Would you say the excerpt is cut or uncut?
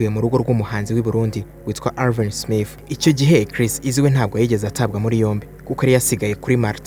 uncut